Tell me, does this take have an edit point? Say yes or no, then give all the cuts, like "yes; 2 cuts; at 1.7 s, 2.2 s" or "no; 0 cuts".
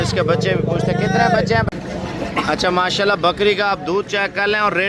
yes; 1 cut; at 1.6 s